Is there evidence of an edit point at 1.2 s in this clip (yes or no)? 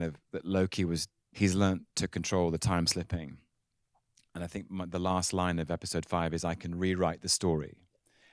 yes